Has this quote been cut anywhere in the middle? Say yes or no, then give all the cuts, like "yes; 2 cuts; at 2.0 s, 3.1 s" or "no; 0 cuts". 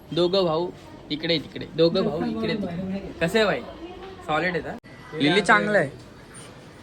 yes; 1 cut; at 4.8 s